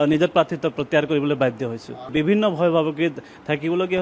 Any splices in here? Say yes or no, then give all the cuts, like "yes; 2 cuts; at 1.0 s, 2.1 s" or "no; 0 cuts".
yes; 1 cut; at 2.1 s